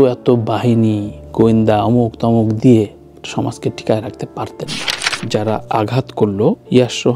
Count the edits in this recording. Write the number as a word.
one